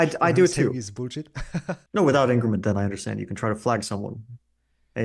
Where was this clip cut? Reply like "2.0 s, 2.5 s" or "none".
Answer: 1.8 s